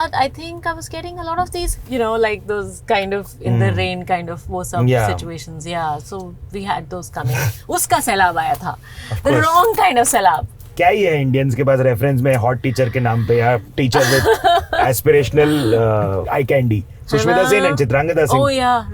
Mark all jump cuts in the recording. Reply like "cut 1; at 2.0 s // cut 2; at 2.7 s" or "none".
cut 1; at 1.8 s // cut 2; at 10.6 s // cut 3; at 16.2 s